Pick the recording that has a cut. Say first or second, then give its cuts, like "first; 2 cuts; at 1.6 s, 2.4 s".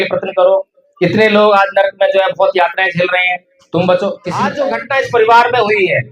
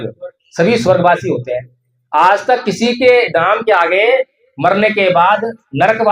first; 1 cut; at 4.5 s